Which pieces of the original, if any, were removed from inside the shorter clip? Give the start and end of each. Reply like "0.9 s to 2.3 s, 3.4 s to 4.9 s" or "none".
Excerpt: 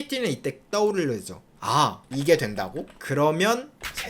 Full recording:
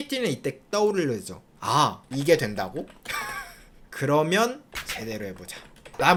2.9 s to 3.8 s